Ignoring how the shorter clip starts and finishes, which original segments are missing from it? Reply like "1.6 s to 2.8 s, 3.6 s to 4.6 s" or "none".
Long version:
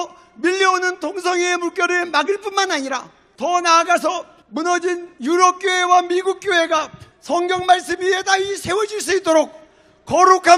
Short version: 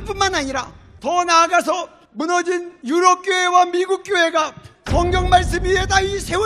none